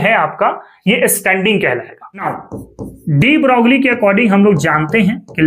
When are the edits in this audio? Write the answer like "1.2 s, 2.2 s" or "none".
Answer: 2.3 s